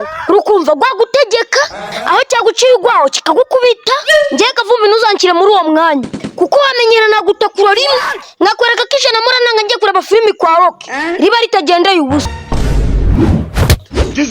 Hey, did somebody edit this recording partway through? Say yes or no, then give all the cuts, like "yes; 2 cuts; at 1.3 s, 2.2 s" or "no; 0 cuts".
yes; 1 cut; at 12.3 s